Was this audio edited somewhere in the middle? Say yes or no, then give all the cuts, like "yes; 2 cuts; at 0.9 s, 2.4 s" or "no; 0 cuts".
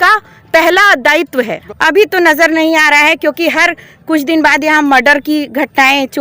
yes; 1 cut; at 1.6 s